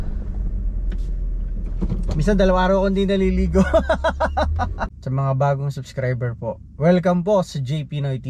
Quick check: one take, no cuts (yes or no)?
no